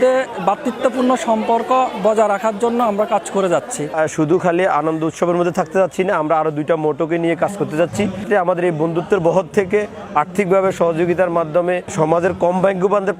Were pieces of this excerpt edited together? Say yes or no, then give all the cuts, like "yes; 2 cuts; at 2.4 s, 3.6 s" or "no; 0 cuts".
yes; 3 cuts; at 3.9 s, 8.2 s, 11.9 s